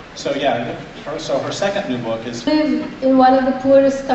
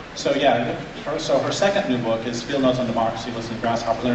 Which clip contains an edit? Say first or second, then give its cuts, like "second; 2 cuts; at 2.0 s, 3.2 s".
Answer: second; 1 cut; at 2.4 s